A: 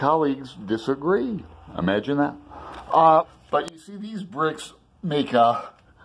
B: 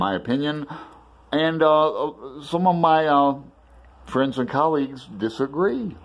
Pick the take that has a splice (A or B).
A